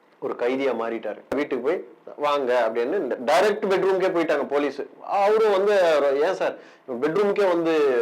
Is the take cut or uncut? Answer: cut